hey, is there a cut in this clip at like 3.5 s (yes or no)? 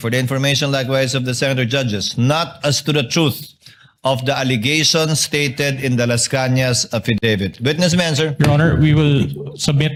no